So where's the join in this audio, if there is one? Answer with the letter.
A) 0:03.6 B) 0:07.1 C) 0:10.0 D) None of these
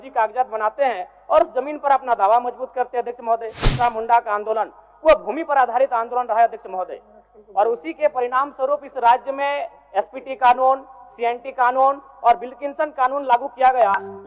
A